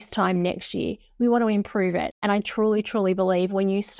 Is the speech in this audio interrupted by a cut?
yes; 1 cut; at 2.1 s

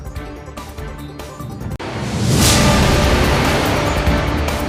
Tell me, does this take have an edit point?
no; 0 cuts

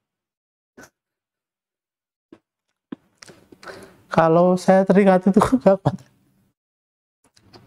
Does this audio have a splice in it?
no; 0 cuts

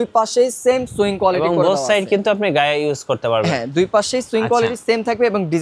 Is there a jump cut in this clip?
no; 0 cuts

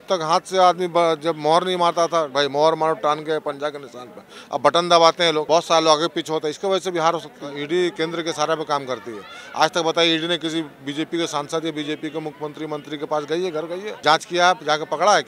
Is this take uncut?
no; 4 cuts; at 2.3 s, 5.4 s, 7.6 s, 13.9 s

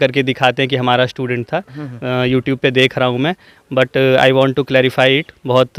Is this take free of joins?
yes; 0 cuts

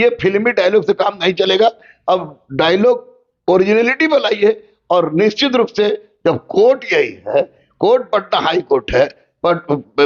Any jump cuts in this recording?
no; 0 cuts

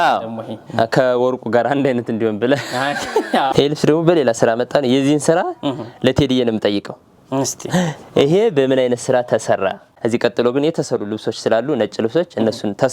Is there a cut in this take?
yes; 2 cuts; at 3.5 s, 9.9 s

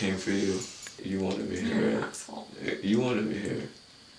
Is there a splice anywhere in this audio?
yes; 1 cut; at 1.0 s

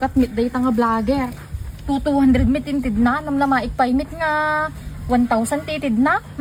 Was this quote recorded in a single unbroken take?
yes; 0 cuts

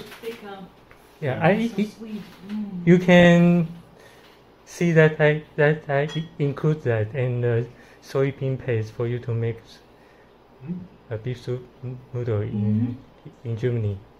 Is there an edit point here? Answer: no; 0 cuts

